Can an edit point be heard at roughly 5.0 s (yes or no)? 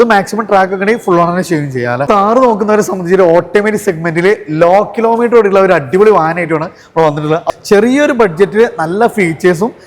no